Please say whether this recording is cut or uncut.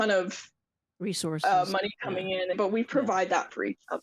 cut